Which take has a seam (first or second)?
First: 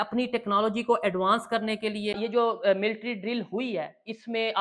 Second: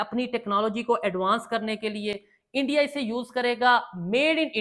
first